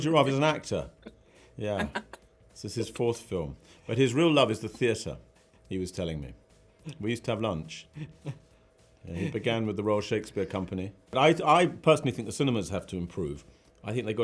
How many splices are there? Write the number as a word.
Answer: one